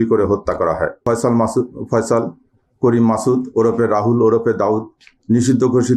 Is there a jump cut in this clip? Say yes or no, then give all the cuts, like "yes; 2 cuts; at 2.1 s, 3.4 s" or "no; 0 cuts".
yes; 1 cut; at 1.0 s